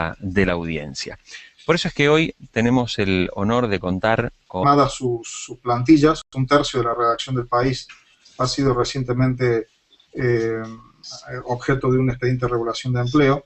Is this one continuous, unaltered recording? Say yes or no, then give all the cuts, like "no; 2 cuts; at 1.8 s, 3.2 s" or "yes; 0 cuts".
yes; 0 cuts